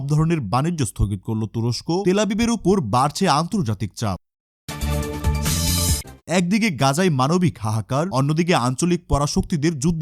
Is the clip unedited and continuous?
yes; 0 cuts

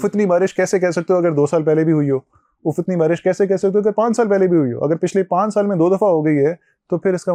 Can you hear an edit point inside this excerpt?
no; 0 cuts

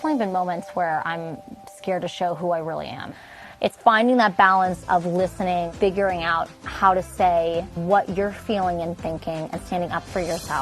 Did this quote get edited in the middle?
yes; 3 cuts; at 3.1 s, 5.7 s, 7.7 s

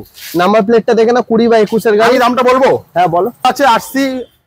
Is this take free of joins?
no; 1 cut; at 3.4 s

